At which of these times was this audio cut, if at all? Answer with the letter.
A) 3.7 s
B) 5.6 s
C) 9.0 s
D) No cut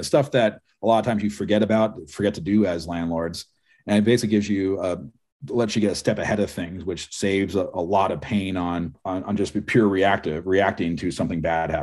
C